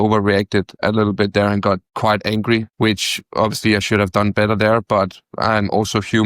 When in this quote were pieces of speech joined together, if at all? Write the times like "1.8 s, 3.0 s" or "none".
0.8 s, 2.2 s